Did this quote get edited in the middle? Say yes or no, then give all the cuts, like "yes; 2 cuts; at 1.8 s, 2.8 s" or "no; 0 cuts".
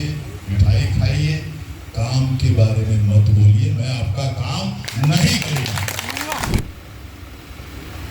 yes; 1 cut; at 6.6 s